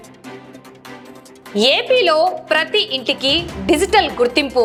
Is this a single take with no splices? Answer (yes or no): yes